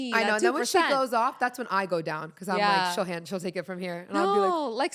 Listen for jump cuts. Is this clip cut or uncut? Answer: uncut